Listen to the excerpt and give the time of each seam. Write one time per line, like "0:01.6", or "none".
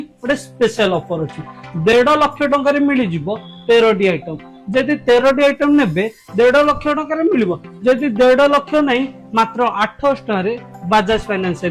none

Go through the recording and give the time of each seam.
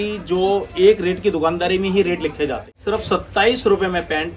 0:02.7

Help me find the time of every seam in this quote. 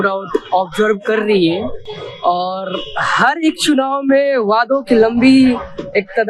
none

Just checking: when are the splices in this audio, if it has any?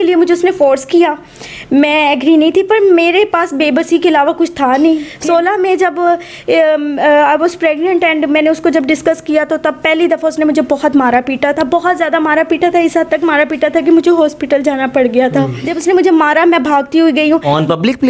0:05.1
0:15.6

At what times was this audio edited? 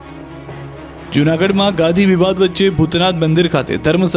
none

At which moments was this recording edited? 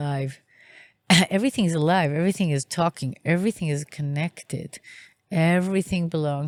none

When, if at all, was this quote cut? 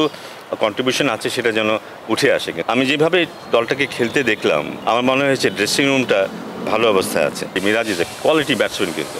0:02.6
0:04.7
0:07.5

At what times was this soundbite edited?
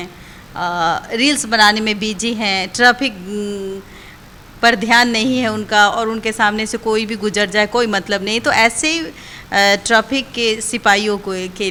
none

